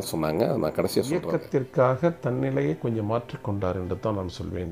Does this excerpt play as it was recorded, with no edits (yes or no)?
no